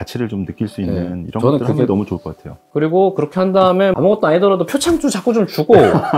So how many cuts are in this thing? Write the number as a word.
one